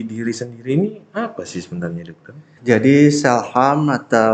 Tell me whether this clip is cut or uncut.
cut